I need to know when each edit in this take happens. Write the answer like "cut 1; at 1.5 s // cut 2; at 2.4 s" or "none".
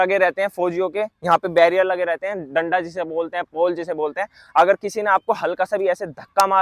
none